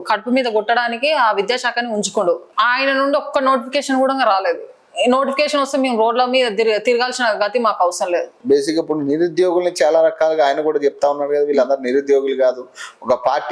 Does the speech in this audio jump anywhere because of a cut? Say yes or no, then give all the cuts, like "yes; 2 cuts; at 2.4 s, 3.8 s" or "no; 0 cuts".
yes; 2 cuts; at 2.5 s, 8.3 s